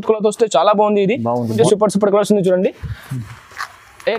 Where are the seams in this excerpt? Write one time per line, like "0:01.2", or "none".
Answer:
0:01.6